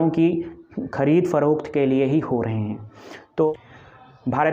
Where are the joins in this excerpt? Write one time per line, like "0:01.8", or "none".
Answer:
0:03.5